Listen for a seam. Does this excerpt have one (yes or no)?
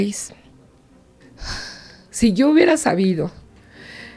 yes